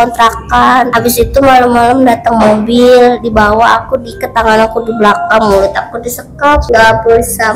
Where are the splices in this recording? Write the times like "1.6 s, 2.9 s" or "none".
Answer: 0.9 s, 6.6 s